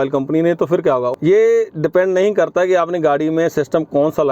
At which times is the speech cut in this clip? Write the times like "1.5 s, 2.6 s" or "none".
1.1 s